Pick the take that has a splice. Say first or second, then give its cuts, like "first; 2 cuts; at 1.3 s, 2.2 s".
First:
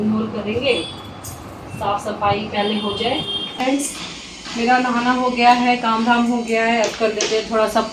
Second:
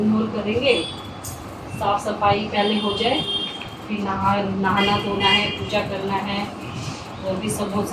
first; 1 cut; at 3.6 s